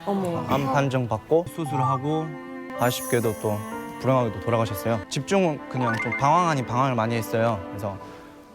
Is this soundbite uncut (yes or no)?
no